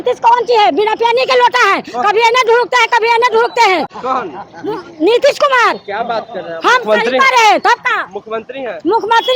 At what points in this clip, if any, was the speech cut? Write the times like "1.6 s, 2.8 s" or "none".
none